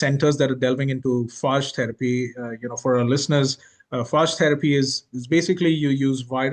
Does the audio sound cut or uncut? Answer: uncut